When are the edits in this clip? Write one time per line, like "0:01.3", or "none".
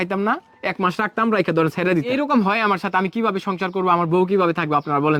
0:02.1